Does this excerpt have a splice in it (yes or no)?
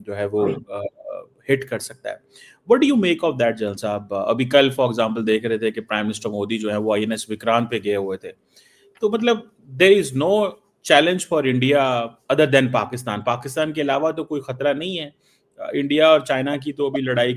no